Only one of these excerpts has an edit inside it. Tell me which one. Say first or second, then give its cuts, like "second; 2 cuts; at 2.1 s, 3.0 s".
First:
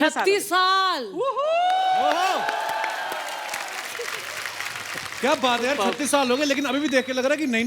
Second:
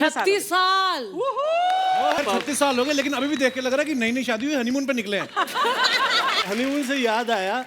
second; 2 cuts; at 2.2 s, 6.4 s